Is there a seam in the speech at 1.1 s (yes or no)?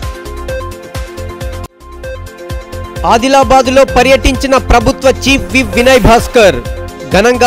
yes